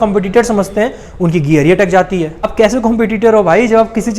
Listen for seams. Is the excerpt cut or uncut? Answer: cut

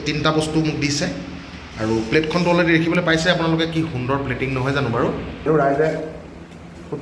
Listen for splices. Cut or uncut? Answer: cut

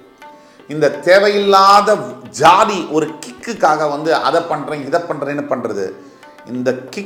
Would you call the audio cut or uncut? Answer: uncut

